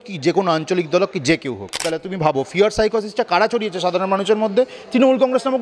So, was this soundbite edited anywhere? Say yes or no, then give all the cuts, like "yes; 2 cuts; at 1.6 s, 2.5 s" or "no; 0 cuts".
yes; 1 cut; at 1.9 s